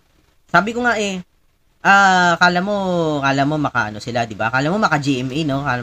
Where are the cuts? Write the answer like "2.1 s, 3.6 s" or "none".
none